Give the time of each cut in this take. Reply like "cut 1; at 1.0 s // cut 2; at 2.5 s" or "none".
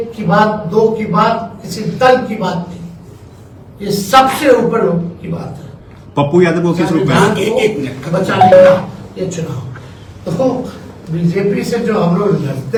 none